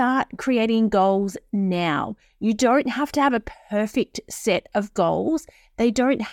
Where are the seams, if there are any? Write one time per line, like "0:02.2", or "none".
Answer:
none